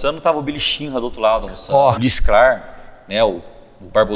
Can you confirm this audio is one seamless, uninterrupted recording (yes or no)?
no